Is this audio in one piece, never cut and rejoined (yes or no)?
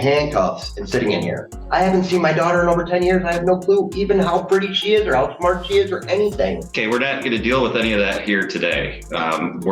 no